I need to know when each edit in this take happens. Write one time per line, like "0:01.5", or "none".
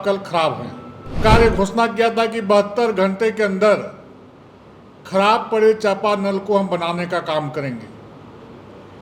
0:01.2

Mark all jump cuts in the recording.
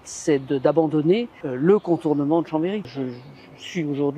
0:01.4
0:02.8

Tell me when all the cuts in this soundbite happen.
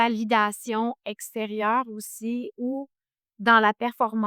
none

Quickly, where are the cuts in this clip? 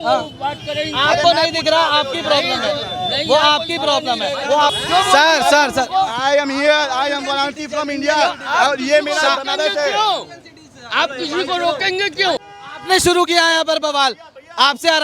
0:04.8
0:12.4

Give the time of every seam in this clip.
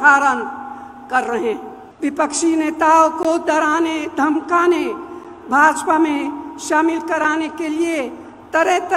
0:01.8

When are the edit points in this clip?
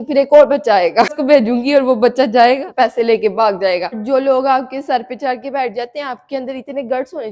0:01.2
0:02.7
0:04.0

